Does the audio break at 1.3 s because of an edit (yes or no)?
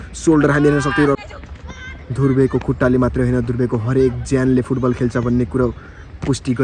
yes